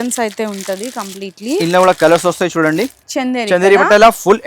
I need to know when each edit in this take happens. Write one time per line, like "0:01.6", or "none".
0:03.0